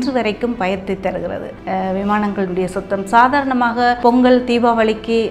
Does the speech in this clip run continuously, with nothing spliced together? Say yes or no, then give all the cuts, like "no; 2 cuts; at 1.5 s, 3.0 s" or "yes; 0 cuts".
no; 2 cuts; at 1.5 s, 4.0 s